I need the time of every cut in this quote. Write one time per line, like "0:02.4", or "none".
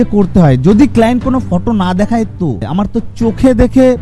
0:02.7